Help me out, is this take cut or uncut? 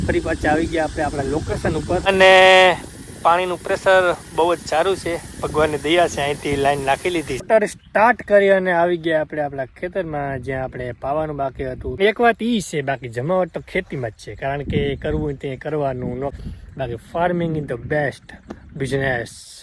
cut